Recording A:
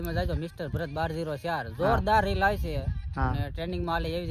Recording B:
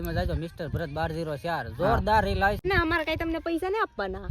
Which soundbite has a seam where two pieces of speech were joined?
B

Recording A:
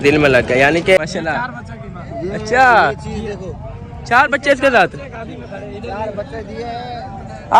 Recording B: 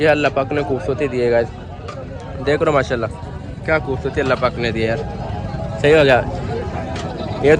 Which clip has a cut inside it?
A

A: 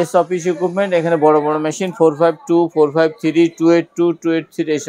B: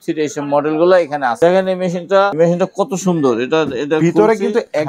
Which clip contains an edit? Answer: B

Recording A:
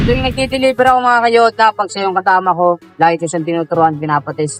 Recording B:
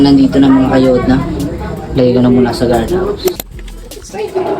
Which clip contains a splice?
B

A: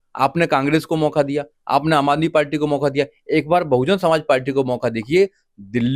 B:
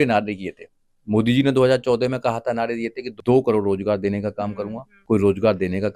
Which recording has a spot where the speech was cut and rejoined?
B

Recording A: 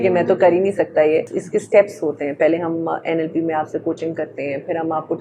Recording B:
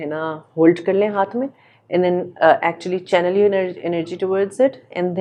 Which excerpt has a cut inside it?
A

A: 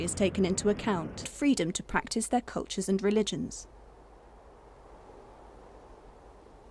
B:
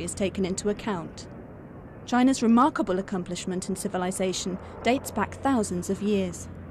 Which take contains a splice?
B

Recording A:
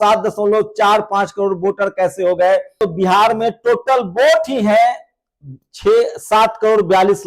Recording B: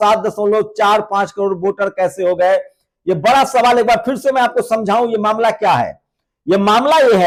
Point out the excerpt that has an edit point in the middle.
A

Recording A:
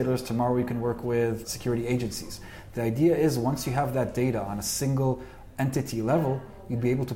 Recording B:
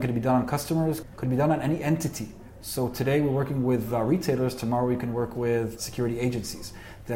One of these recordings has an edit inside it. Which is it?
B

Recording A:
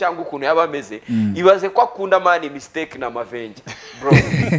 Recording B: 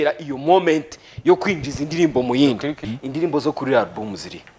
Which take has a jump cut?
B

